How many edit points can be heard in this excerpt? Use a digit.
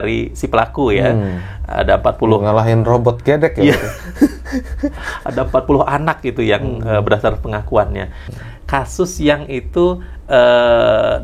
1